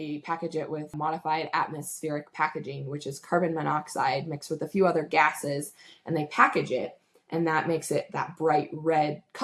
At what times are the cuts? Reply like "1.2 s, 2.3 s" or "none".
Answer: 0.9 s